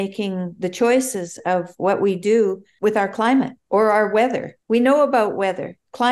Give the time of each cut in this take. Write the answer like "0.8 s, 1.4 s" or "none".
2.7 s, 3.6 s, 4.5 s